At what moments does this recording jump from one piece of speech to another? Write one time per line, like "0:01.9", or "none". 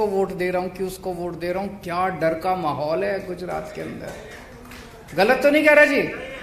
none